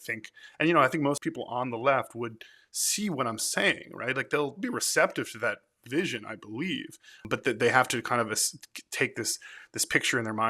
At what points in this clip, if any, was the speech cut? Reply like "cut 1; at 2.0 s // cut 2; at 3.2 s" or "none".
cut 1; at 1.2 s // cut 2; at 4.6 s // cut 3; at 7.2 s

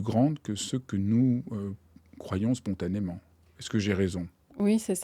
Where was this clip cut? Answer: none

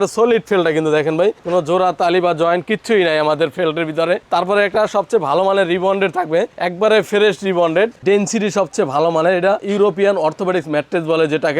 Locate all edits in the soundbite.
cut 1; at 8.0 s // cut 2; at 9.6 s

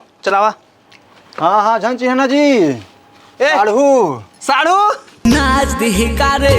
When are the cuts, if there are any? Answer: cut 1; at 5.3 s

